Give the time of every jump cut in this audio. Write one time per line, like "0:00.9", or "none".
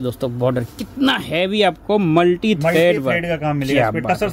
none